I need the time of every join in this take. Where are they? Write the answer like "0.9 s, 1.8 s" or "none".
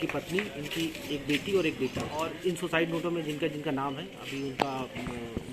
2.1 s